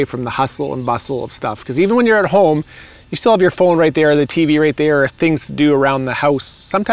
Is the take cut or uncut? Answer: uncut